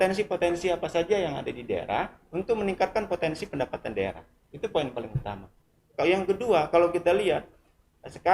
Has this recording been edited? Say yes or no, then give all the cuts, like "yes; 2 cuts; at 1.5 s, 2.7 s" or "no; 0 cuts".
no; 0 cuts